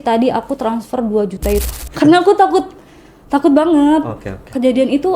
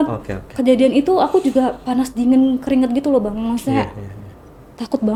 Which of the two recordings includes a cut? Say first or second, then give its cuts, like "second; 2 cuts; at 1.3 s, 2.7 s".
first; 1 cut; at 1.7 s